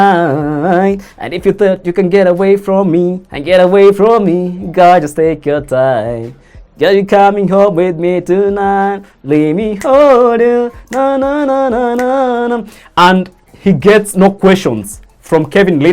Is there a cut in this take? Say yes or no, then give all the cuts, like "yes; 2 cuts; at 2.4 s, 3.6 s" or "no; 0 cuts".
no; 0 cuts